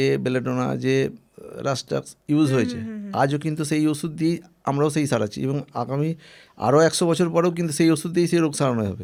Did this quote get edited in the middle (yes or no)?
no